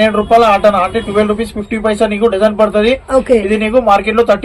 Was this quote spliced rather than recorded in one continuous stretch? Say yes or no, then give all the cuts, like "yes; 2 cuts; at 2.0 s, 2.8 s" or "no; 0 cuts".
no; 0 cuts